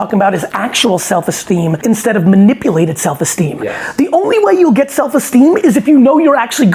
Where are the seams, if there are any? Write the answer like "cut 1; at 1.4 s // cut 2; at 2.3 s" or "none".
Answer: cut 1; at 1.8 s